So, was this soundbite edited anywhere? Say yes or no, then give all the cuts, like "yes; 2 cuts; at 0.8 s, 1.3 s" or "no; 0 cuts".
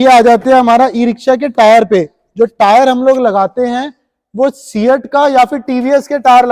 no; 0 cuts